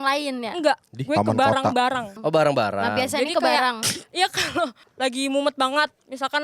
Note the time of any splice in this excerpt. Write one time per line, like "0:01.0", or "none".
0:00.9
0:02.1
0:04.8